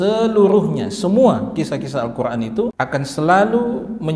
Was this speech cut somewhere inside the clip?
yes; 1 cut; at 2.7 s

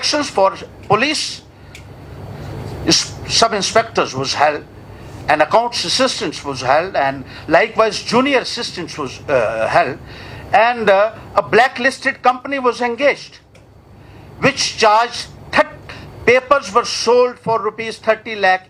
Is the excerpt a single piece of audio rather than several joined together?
yes; 0 cuts

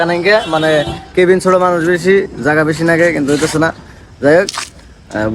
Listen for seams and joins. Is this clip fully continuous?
yes; 0 cuts

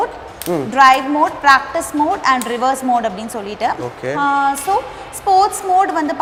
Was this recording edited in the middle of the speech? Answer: no; 0 cuts

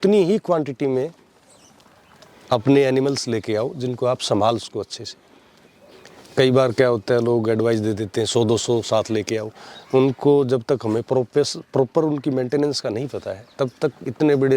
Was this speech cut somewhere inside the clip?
no; 0 cuts

